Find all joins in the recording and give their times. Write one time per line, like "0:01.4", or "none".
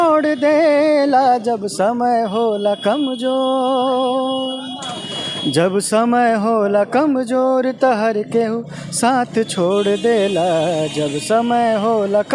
none